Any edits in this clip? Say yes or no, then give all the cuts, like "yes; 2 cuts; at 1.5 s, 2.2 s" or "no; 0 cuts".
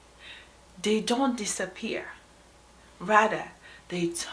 no; 0 cuts